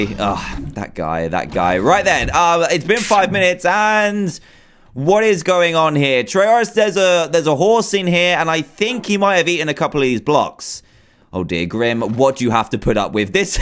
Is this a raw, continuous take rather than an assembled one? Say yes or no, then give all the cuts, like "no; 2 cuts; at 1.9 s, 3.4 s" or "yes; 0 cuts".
no; 1 cut; at 10.4 s